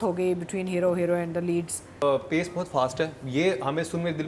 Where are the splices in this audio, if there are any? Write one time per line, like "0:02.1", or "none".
0:02.0